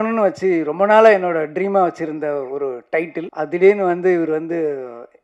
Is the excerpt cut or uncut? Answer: cut